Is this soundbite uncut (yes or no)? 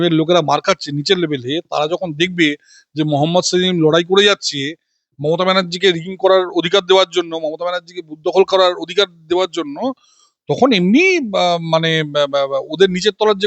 yes